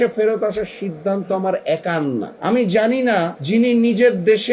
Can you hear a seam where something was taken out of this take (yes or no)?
yes